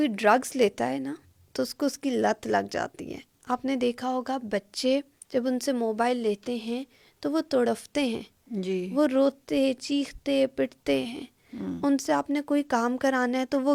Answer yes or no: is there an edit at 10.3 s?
no